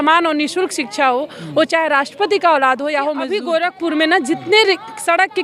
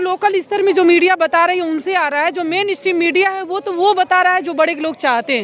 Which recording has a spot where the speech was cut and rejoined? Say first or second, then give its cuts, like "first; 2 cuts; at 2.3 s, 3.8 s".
first; 1 cut; at 3.3 s